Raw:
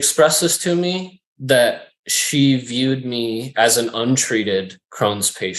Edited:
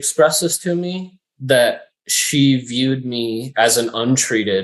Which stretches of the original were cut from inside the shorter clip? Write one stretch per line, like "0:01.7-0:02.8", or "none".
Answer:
none